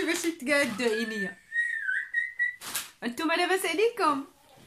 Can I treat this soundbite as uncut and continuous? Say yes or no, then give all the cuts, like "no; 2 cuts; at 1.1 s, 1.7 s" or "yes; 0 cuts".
no; 1 cut; at 2.7 s